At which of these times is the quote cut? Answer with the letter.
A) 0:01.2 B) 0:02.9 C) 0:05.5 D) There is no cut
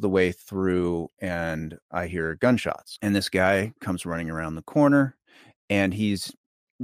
B